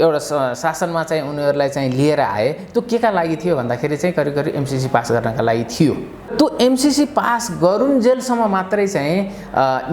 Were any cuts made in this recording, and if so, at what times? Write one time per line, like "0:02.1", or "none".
0:06.3